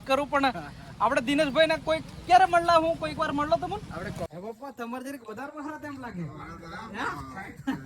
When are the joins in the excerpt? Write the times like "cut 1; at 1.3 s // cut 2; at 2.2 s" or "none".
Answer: cut 1; at 4.3 s